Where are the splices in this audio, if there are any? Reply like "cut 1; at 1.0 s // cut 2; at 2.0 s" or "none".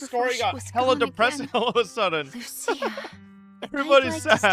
none